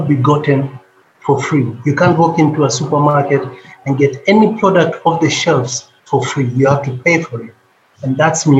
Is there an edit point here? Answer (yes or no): no